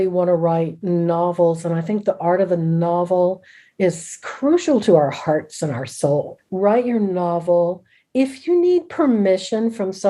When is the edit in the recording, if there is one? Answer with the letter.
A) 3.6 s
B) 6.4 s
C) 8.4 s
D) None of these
B